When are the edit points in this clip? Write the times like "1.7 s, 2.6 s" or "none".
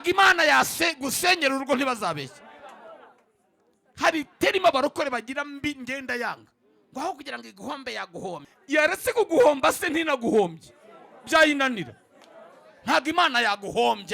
8.5 s